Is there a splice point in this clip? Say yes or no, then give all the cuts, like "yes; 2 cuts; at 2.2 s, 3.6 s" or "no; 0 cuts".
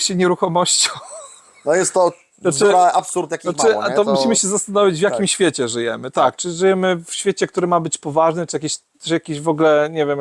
no; 0 cuts